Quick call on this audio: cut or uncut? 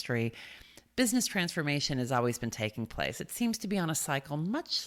uncut